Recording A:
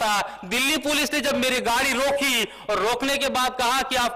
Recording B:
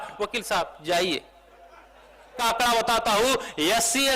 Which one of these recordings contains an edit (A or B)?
B